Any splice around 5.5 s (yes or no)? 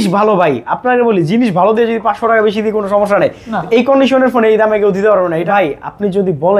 yes